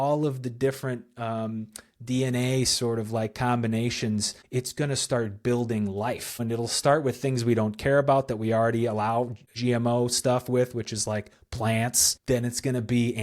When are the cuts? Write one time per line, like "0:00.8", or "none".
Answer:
0:04.4
0:06.4
0:09.5
0:12.1